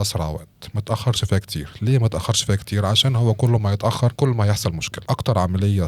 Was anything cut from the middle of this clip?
yes; 2 cuts; at 4.1 s, 4.9 s

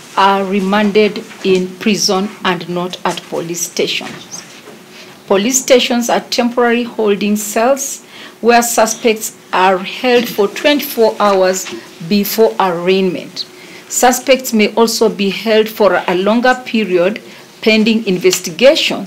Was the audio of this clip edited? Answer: no; 0 cuts

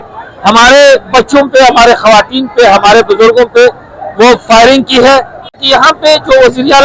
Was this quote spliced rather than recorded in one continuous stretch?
yes; 1 cut; at 5.6 s

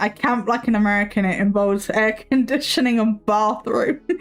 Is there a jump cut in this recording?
no; 0 cuts

